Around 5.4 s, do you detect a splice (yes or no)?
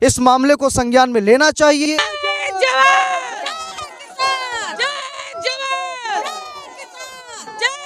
no